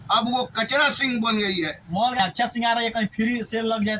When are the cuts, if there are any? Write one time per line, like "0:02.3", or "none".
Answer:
0:02.2